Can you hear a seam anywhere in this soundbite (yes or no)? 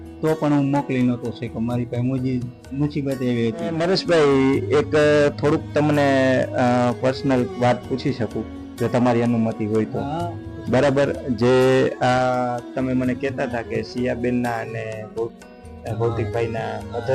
no